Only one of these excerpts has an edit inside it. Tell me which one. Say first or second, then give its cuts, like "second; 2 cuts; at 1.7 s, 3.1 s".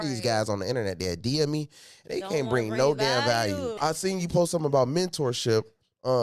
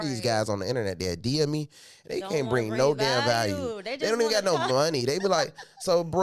first; 1 cut; at 3.8 s